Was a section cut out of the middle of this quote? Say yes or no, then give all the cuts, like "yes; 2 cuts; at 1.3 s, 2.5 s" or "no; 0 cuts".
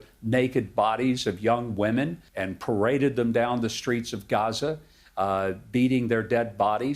yes; 1 cut; at 2.2 s